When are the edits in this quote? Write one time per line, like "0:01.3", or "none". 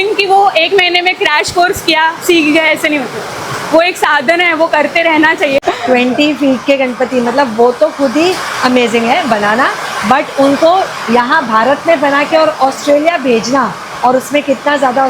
0:05.6